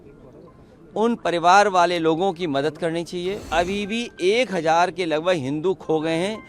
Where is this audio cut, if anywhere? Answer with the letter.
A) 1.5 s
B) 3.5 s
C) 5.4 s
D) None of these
B